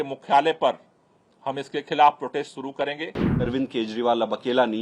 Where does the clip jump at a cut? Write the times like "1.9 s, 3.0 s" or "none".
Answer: 3.3 s